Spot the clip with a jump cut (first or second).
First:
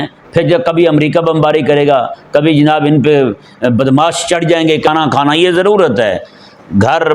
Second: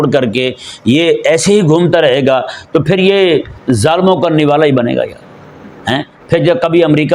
first